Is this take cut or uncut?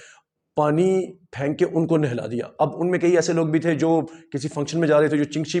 uncut